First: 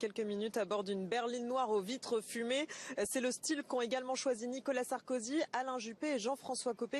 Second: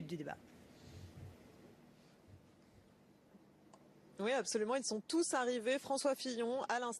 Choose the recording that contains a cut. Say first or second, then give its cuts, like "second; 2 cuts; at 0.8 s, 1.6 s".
second; 1 cut; at 1.8 s